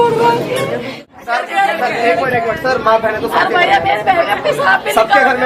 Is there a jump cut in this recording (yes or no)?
yes